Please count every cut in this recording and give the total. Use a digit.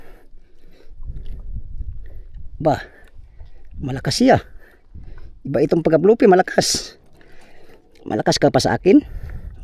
0